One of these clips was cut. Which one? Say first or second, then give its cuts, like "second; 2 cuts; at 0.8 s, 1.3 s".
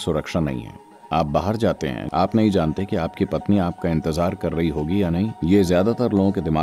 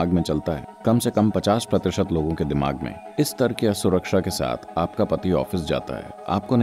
first; 1 cut; at 2.0 s